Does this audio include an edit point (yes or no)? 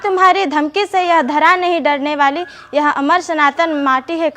no